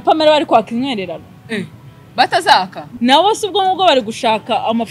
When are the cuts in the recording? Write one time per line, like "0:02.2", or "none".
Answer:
0:02.9